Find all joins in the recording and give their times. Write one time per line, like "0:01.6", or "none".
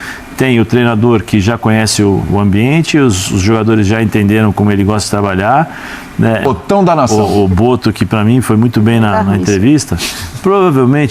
0:06.4